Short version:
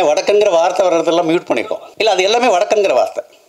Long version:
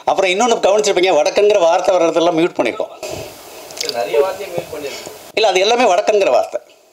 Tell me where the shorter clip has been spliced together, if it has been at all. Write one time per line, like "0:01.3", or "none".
0:01.8